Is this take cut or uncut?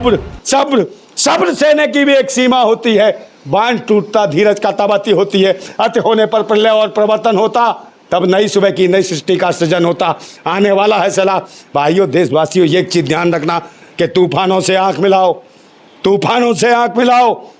uncut